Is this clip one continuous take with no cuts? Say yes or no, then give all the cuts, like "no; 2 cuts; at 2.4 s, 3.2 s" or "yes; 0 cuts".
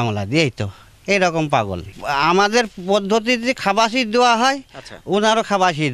no; 1 cut; at 1.9 s